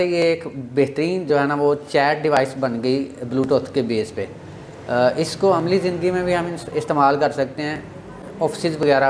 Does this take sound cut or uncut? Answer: uncut